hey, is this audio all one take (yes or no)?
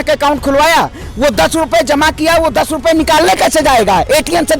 yes